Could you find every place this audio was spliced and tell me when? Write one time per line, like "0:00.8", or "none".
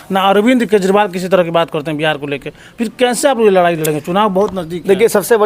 none